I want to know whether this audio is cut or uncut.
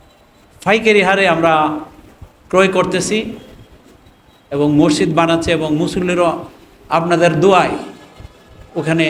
uncut